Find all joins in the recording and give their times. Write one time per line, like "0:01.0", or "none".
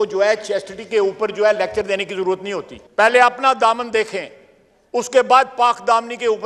0:02.8